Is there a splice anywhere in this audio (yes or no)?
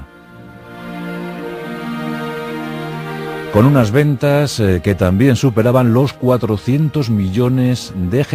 yes